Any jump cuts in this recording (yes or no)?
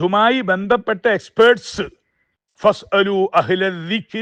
no